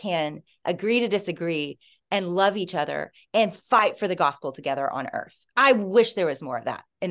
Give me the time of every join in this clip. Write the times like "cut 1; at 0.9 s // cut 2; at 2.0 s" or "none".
none